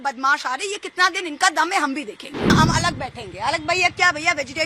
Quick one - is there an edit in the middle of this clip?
yes; 1 cut; at 2.5 s

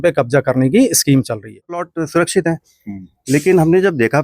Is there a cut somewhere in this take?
yes; 1 cut; at 1.9 s

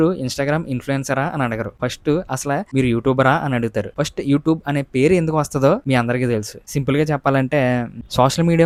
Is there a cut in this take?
no; 0 cuts

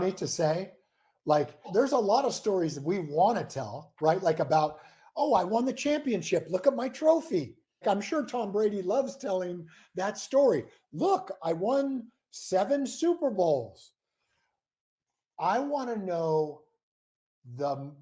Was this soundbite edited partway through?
yes; 2 cuts; at 1.7 s, 7.8 s

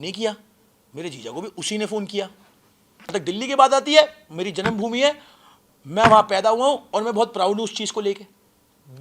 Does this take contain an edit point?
yes; 1 cut; at 3.1 s

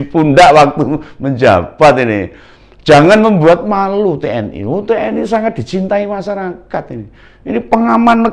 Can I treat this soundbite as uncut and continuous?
yes; 0 cuts

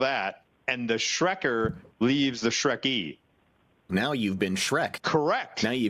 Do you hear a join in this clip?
yes; 2 cuts; at 3.8 s, 5.0 s

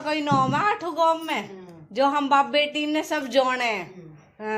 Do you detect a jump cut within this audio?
no; 0 cuts

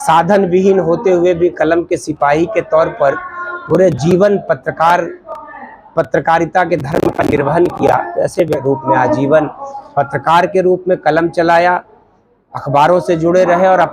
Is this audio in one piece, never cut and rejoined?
no; 1 cut; at 8.6 s

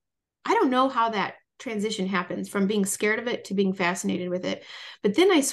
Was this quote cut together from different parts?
no; 0 cuts

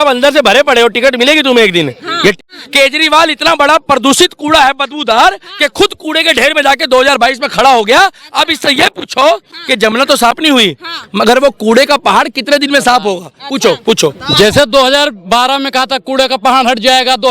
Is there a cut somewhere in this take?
yes; 1 cut; at 2.4 s

